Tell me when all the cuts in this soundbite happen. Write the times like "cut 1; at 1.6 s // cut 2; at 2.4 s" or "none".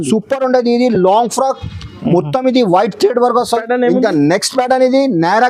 cut 1; at 3.6 s